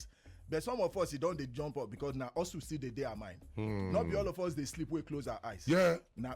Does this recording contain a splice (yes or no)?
no